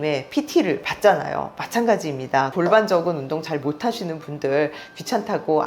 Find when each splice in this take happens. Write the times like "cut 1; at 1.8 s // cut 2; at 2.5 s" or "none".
cut 1; at 2.5 s